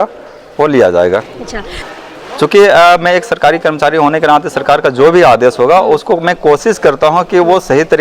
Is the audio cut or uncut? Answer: cut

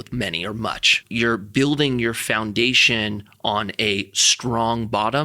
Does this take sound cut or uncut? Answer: cut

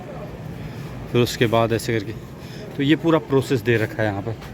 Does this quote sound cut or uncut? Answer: uncut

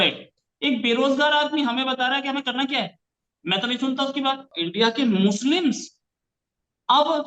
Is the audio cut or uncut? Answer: cut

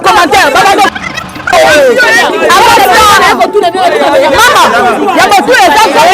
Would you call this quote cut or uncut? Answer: uncut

